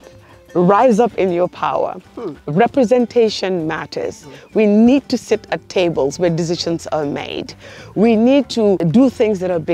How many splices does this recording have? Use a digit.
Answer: 1